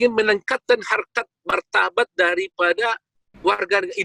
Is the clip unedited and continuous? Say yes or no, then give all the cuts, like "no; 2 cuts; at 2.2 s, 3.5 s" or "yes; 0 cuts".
yes; 0 cuts